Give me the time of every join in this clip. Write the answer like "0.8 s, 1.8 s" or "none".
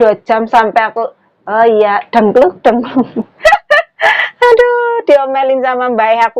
3.2 s